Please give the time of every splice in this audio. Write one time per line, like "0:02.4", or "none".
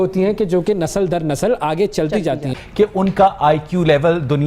0:02.6